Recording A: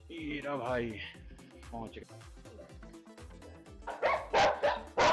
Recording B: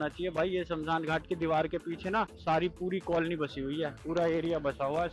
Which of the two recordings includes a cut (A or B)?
A